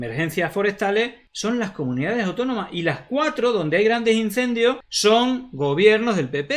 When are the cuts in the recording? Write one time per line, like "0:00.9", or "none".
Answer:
0:01.2
0:04.9